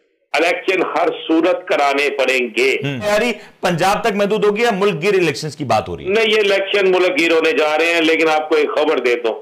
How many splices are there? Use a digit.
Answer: 1